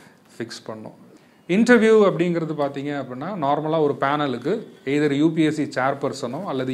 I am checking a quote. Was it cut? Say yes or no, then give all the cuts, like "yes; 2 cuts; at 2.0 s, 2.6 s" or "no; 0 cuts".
yes; 1 cut; at 1.0 s